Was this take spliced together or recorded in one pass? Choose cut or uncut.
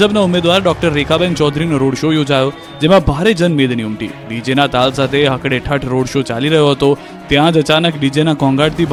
uncut